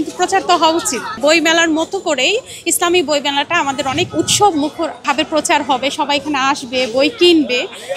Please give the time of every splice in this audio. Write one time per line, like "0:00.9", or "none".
0:01.2
0:05.0